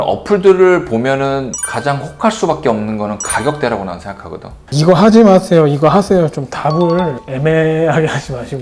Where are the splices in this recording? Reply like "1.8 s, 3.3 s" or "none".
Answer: 4.8 s